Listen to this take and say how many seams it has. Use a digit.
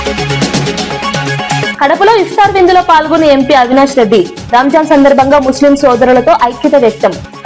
1